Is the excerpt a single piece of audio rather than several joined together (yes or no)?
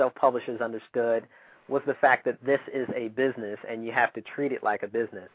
yes